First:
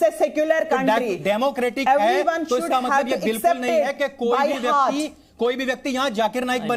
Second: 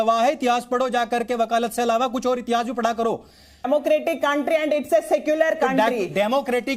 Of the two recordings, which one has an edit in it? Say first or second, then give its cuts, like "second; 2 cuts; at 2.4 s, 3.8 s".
second; 1 cut; at 3.7 s